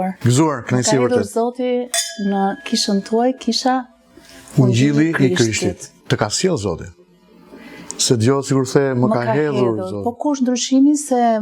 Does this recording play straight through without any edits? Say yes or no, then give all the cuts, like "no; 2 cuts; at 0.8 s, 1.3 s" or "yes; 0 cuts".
yes; 0 cuts